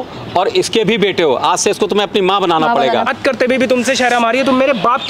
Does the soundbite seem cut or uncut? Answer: cut